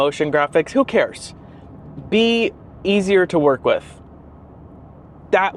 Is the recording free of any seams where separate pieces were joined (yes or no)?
yes